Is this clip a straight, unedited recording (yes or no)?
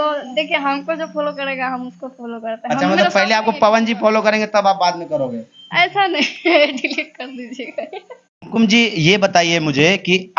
yes